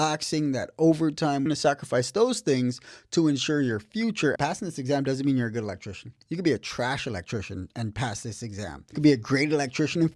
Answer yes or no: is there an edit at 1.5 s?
yes